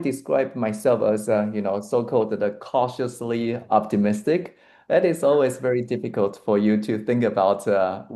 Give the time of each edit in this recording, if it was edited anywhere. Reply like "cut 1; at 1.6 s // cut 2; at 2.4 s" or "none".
none